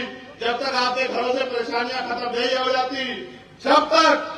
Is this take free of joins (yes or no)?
yes